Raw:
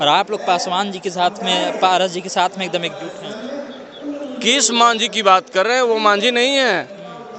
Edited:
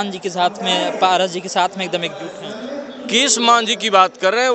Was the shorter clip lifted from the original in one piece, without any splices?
no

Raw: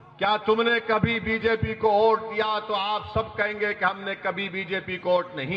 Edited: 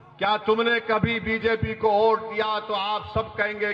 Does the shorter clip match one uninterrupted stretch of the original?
yes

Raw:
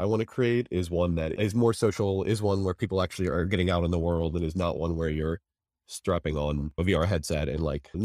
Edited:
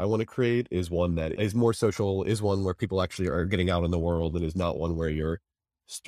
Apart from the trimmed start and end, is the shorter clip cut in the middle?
no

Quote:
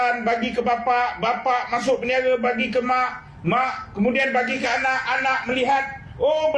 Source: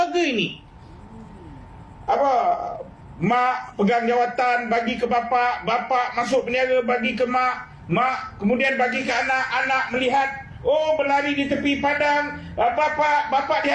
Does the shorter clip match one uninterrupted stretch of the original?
yes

